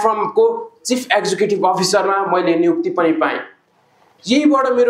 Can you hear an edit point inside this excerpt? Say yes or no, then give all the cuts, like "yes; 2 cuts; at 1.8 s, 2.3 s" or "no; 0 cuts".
no; 0 cuts